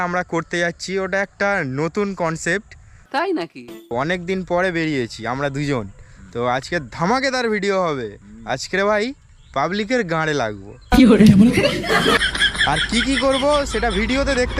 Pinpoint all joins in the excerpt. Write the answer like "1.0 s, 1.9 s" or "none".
none